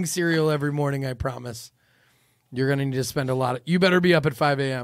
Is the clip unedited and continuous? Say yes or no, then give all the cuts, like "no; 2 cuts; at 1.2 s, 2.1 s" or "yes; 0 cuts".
yes; 0 cuts